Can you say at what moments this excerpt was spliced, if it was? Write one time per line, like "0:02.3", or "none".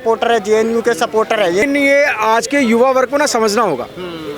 0:01.6

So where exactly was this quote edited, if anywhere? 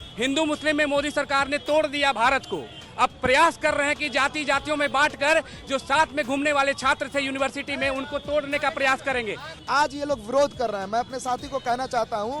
0:09.5

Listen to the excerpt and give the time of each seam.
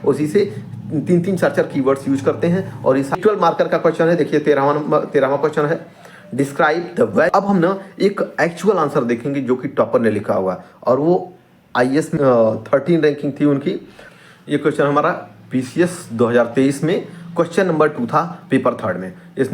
0:03.2
0:07.3
0:12.1
0:14.2

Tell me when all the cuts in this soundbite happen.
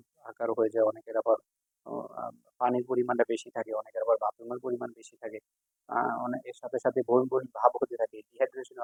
none

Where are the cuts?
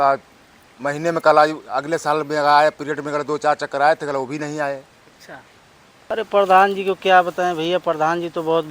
0:06.1

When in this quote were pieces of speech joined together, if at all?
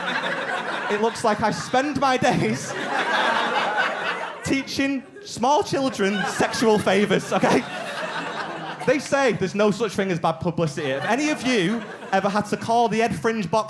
none

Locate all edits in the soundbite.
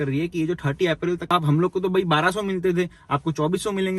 0:01.2

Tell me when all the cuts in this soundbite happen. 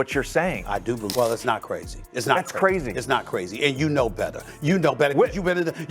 0:01.1

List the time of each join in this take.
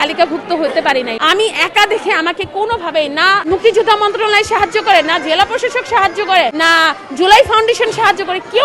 0:01.2
0:03.4
0:06.5

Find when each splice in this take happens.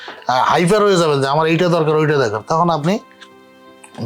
none

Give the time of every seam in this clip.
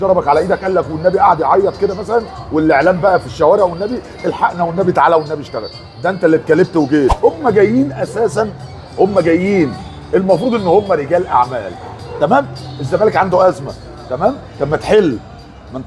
0:07.2

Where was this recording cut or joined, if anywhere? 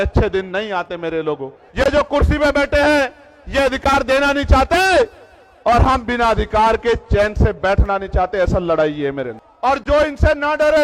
0:01.6
0:09.4

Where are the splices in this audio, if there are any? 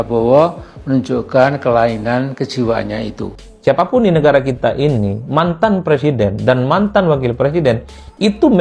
0:03.2

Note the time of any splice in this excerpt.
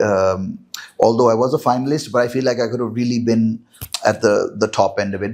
none

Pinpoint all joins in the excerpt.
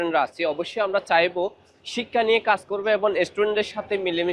none

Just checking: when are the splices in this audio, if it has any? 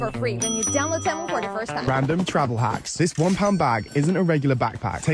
0:01.9

